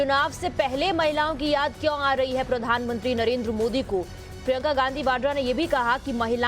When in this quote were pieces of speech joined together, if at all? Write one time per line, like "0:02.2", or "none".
none